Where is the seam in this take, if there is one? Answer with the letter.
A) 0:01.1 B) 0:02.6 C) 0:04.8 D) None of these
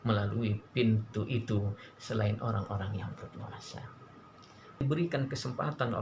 C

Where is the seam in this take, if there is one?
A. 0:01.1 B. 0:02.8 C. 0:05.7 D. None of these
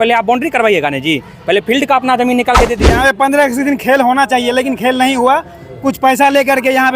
B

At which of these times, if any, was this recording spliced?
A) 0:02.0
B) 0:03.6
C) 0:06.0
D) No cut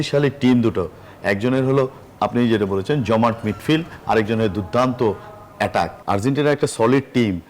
C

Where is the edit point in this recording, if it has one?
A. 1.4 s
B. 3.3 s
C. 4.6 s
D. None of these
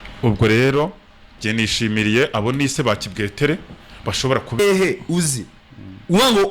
C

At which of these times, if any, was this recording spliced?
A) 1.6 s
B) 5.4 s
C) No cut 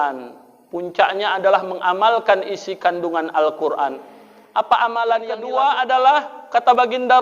B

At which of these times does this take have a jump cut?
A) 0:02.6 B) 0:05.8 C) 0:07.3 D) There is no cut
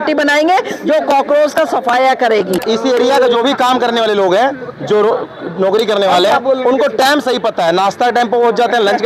A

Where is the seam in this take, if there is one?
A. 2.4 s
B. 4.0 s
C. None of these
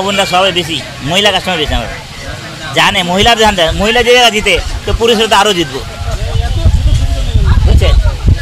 C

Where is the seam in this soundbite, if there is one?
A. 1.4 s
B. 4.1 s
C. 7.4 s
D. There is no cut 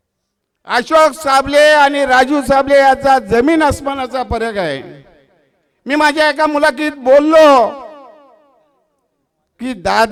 D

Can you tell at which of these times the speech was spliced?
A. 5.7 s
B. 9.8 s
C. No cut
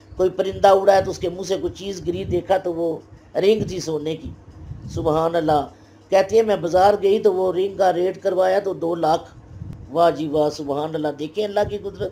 C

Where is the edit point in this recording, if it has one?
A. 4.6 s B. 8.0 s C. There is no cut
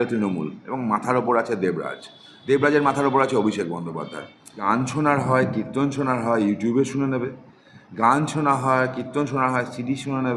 A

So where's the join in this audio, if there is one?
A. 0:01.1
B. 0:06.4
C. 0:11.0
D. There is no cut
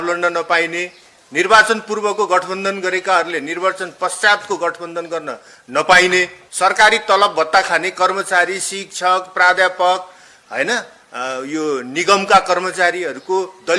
B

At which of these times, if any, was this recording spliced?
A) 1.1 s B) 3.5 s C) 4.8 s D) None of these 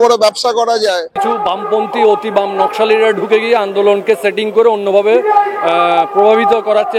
A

